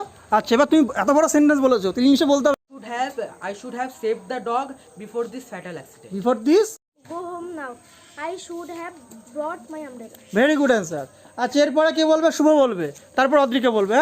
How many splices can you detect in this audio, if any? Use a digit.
2